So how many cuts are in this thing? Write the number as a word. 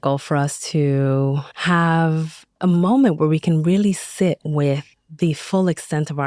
one